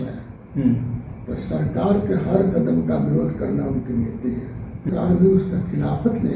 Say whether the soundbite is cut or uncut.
cut